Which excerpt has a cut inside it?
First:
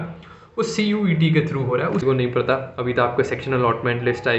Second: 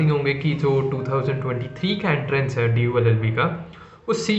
first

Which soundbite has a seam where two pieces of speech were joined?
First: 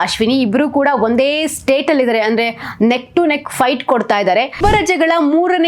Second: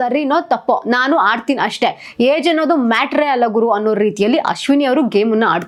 first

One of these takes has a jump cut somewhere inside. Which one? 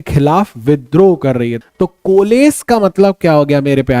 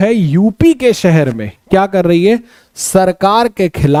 first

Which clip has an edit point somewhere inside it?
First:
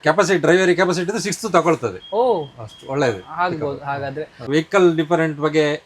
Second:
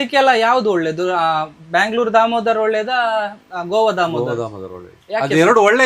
first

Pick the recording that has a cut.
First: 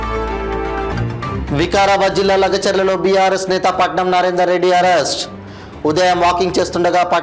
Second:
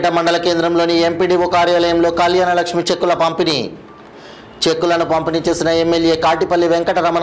first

